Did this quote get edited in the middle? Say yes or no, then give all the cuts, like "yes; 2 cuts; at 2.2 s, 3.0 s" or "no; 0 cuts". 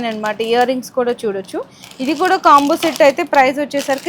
no; 0 cuts